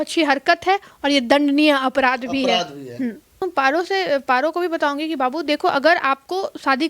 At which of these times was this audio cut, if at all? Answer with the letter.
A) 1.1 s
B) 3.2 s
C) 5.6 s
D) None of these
B